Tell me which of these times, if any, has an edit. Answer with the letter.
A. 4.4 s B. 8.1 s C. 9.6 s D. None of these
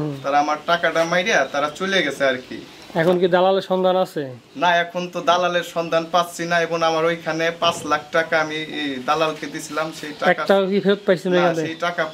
D